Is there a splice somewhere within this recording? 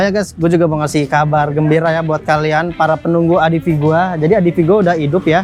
no; 0 cuts

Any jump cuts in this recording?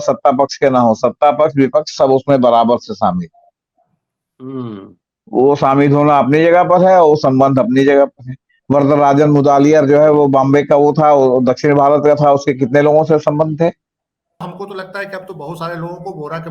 yes; 1 cut; at 14.4 s

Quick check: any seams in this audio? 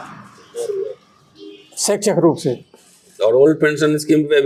no; 0 cuts

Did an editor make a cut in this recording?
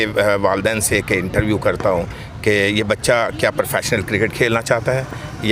no; 0 cuts

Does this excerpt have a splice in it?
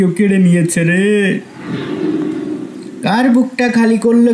yes; 2 cuts; at 1.6 s, 2.9 s

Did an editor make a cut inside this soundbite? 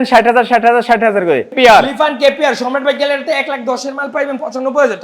yes; 1 cut; at 1.6 s

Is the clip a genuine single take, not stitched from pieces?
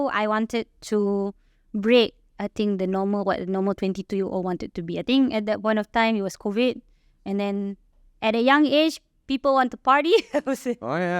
yes; 0 cuts

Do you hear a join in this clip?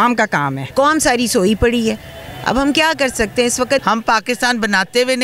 yes; 2 cuts; at 0.7 s, 3.8 s

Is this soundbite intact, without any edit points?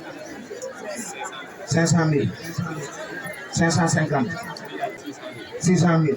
no; 1 cut; at 5.0 s

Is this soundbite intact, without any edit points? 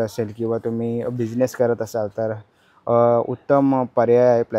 yes; 0 cuts

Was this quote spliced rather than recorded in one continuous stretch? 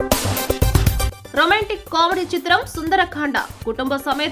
no; 0 cuts

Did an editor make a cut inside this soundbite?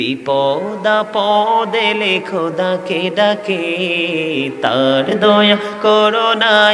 no; 0 cuts

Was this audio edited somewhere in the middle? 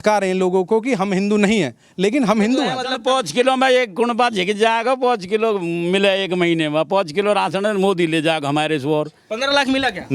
yes; 2 cuts; at 2.8 s, 9.2 s

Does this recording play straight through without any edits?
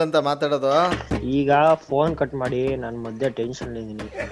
yes; 0 cuts

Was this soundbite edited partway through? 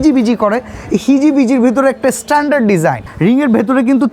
yes; 1 cut; at 3.0 s

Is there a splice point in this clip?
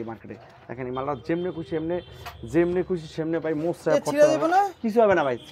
no; 0 cuts

